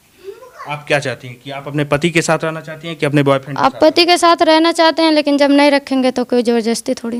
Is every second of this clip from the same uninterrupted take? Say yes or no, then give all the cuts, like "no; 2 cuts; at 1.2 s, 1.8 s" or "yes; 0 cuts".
yes; 0 cuts